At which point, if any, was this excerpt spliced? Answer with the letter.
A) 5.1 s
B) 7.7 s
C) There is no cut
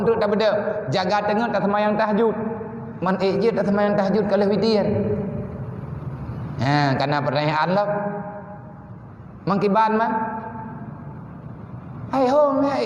C